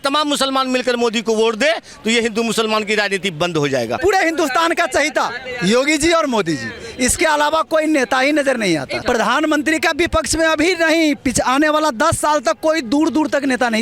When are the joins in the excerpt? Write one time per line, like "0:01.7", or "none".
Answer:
0:04.0
0:08.9